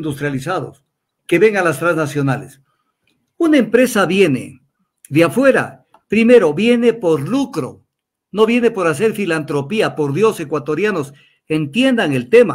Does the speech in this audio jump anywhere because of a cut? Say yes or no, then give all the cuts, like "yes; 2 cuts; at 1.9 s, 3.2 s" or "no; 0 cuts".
yes; 1 cut; at 1.1 s